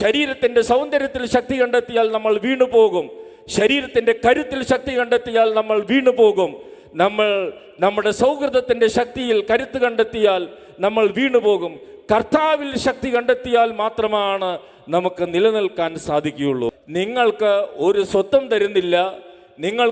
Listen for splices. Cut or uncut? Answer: cut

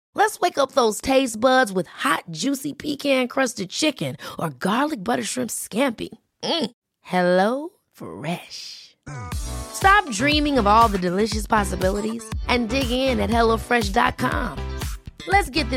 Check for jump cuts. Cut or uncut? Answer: uncut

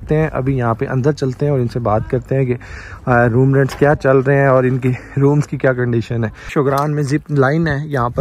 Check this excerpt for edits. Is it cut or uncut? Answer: cut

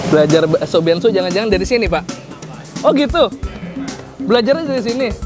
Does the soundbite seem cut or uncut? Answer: uncut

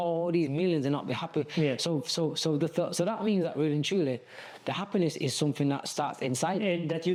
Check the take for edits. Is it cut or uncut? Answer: uncut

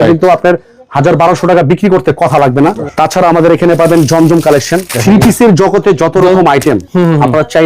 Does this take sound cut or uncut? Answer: cut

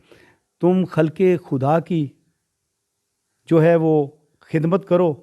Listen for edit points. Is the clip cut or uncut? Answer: uncut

